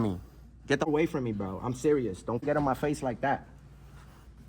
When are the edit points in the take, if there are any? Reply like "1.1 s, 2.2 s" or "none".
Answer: 0.9 s, 2.4 s